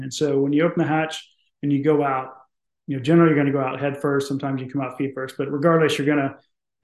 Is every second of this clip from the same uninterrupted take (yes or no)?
yes